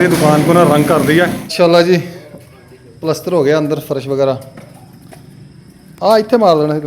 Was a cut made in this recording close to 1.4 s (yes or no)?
yes